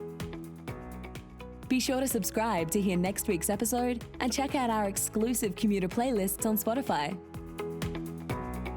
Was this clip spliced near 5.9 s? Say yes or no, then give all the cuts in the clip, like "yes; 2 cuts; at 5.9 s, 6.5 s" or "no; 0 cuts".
no; 2 cuts; at 1.6 s, 7.3 s